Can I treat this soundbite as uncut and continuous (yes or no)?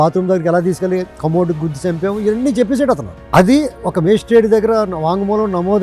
yes